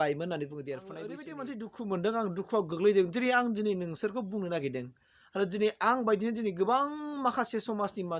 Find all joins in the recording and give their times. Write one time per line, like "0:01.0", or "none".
0:01.2

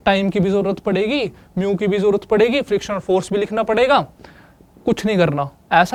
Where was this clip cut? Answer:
none

